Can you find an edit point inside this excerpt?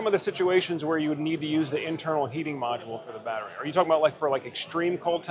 no; 0 cuts

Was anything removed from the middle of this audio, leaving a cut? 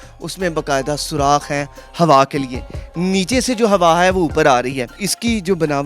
yes; 1 cut; at 4.9 s

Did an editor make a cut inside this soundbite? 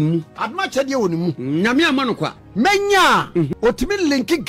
yes; 2 cuts; at 2.4 s, 3.5 s

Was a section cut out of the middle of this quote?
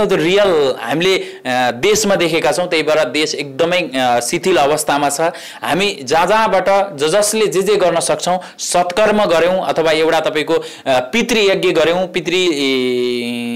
no; 0 cuts

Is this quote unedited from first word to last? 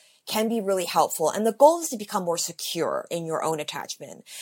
yes; 0 cuts

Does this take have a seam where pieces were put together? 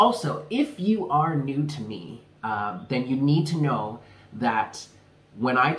no; 0 cuts

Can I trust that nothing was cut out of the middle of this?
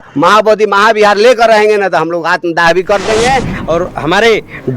no; 1 cut; at 3.6 s

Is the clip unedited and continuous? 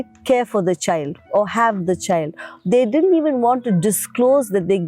yes; 0 cuts

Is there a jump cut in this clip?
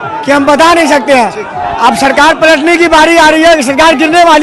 no; 0 cuts

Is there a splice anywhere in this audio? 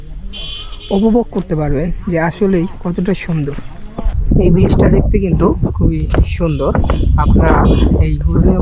yes; 1 cut; at 4.1 s

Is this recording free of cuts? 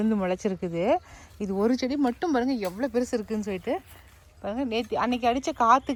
yes; 0 cuts

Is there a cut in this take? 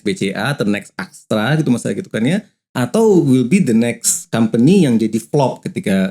no; 0 cuts

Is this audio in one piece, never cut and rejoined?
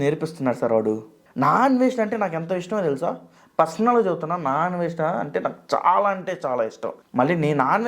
no; 1 cut; at 1.2 s

